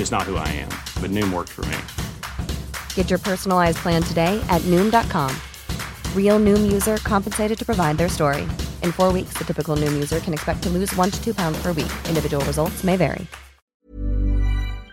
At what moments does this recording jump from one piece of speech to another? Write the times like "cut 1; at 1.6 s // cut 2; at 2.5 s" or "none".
cut 1; at 13.6 s

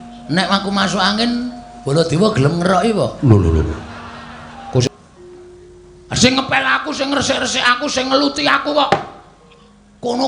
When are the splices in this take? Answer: cut 1; at 4.9 s

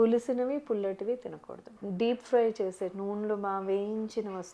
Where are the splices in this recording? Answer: cut 1; at 1.8 s

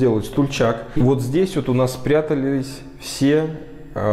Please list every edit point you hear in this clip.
cut 1; at 0.9 s

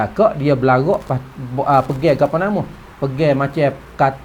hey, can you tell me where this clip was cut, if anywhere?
none

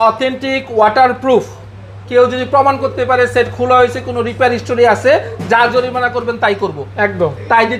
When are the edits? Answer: none

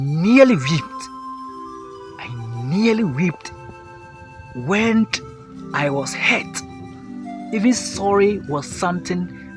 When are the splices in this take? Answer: cut 1; at 1.0 s // cut 2; at 2.5 s

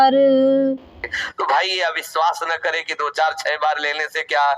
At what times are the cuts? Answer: cut 1; at 1.3 s

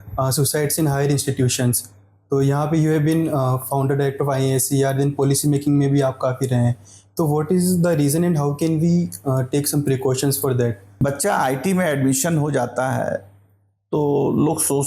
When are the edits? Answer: cut 1; at 10.8 s

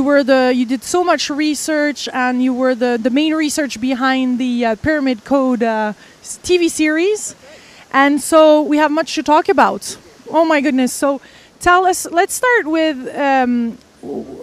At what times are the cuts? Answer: cut 1; at 13.0 s

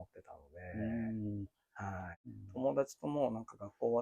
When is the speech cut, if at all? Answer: cut 1; at 2.3 s

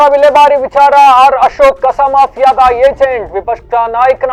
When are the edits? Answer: none

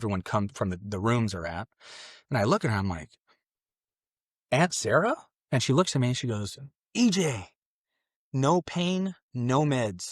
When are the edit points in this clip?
cut 1; at 5.3 s

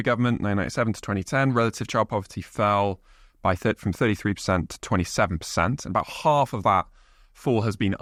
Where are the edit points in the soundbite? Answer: none

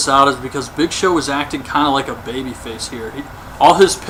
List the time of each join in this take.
none

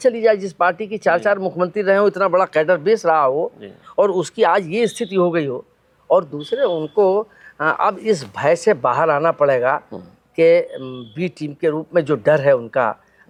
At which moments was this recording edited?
none

